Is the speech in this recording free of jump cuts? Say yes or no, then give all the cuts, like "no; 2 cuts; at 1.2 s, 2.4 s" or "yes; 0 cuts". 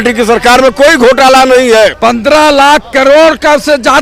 no; 1 cut; at 2.0 s